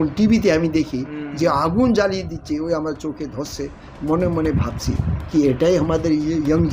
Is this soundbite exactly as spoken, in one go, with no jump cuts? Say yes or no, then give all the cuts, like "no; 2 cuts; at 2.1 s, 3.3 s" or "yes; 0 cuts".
yes; 0 cuts